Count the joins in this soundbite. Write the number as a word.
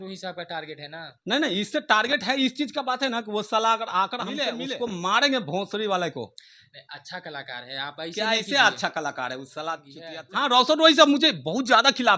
two